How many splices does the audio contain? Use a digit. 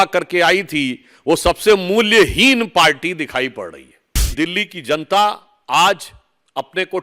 1